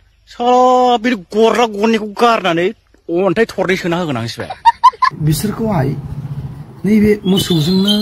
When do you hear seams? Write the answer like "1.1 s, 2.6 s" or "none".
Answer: 5.2 s